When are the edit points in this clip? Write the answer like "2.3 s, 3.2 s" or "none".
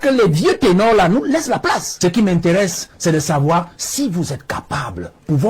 1.9 s